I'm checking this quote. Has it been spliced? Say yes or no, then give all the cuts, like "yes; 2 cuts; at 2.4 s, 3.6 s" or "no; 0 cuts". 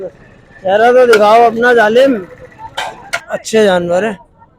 yes; 1 cut; at 3.3 s